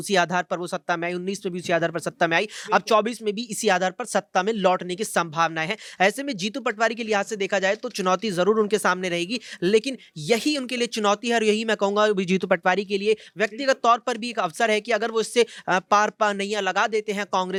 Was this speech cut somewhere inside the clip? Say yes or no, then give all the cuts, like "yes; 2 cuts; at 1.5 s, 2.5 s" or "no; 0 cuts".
no; 0 cuts